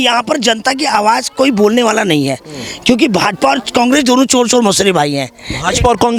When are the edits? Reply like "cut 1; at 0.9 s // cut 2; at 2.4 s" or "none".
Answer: none